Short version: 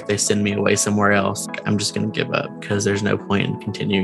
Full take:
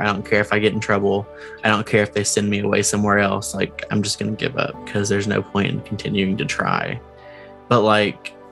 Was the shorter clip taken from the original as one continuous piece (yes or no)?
no